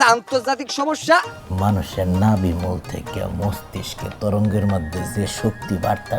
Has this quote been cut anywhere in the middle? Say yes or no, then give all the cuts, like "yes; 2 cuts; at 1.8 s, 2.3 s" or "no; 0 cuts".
yes; 1 cut; at 1.4 s